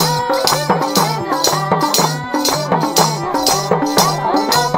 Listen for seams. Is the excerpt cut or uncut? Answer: uncut